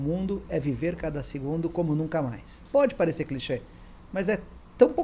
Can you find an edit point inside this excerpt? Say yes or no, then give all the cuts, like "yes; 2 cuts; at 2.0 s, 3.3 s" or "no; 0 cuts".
yes; 1 cut; at 2.5 s